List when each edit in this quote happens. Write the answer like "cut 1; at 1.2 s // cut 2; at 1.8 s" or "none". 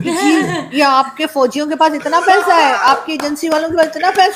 none

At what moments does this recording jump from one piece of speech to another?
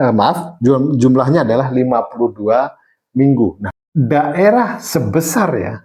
cut 1; at 3.6 s

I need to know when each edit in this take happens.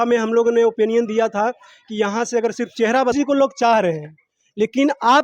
cut 1; at 3.1 s

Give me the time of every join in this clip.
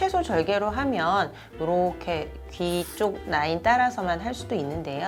none

